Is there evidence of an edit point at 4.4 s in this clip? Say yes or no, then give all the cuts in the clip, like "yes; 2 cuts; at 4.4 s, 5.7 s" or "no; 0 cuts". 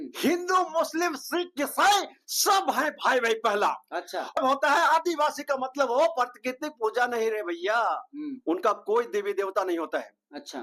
yes; 1 cut; at 4.4 s